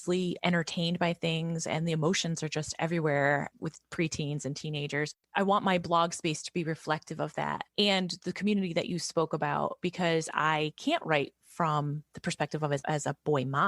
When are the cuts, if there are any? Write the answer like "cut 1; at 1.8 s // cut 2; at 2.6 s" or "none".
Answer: cut 1; at 5.2 s // cut 2; at 12.8 s